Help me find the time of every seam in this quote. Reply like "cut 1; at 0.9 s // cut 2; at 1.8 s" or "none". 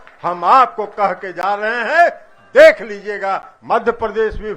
cut 1; at 3.5 s